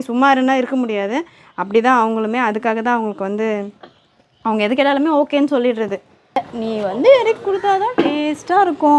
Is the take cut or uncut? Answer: cut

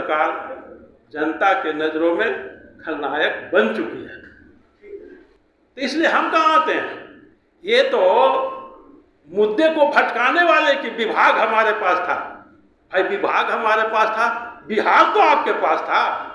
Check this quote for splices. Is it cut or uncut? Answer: cut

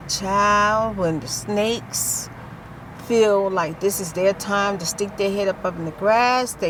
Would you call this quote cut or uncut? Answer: uncut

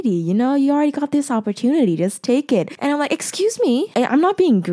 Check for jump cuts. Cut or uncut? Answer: cut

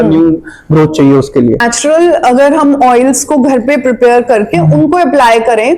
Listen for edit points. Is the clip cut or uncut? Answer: cut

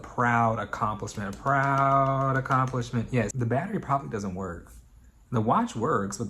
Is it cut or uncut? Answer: cut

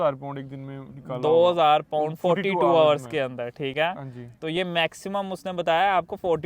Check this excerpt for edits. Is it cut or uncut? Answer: uncut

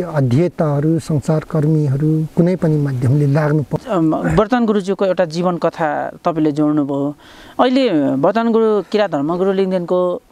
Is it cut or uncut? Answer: cut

